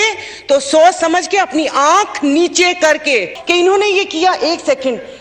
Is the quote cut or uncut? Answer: cut